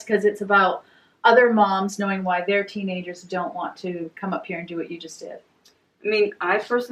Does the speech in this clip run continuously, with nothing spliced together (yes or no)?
yes